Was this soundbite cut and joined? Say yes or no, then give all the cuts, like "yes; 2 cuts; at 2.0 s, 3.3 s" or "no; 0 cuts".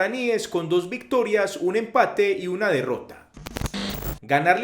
yes; 1 cut; at 3.7 s